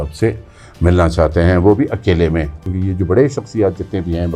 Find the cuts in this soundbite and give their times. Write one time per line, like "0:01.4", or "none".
0:02.7